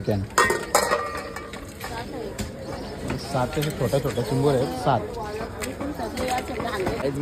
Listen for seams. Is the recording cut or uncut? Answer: uncut